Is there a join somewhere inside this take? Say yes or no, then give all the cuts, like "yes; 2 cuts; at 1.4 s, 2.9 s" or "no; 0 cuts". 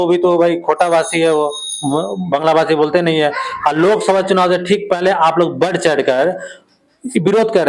no; 0 cuts